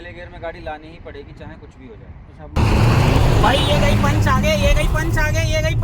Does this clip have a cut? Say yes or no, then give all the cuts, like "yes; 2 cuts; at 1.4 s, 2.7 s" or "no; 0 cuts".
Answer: yes; 1 cut; at 2.6 s